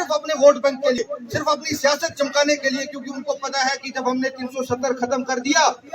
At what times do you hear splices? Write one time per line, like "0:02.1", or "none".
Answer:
0:01.0